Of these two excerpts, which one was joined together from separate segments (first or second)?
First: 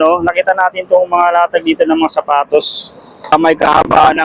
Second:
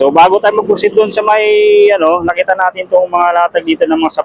first